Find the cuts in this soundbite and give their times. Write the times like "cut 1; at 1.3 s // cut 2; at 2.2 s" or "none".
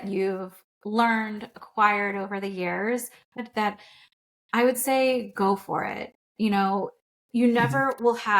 cut 1; at 3.4 s